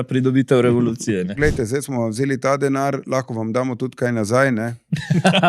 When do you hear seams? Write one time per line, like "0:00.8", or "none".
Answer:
0:01.4